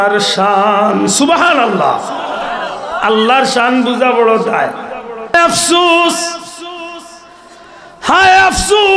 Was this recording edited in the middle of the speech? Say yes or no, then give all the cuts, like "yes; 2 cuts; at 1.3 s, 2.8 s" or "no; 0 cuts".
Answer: yes; 1 cut; at 5.3 s